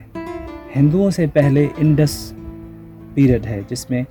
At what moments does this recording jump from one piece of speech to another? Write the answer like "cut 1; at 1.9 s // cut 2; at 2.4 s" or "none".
none